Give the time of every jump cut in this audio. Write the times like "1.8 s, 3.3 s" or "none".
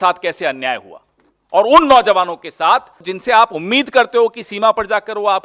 3.1 s